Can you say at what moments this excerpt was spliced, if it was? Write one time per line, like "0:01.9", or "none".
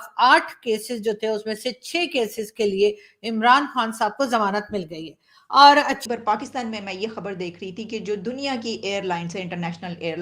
0:06.0